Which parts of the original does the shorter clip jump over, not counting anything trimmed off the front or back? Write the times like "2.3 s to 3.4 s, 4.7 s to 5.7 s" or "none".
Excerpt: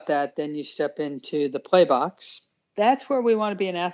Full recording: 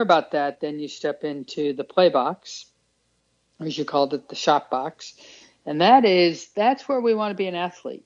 2.9 s to 6.4 s